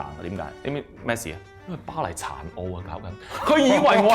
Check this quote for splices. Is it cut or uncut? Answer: cut